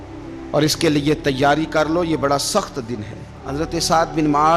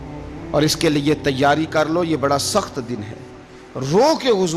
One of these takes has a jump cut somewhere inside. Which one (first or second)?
first